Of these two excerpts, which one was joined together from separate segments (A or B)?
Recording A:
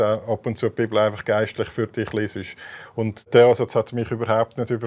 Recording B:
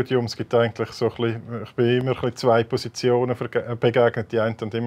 A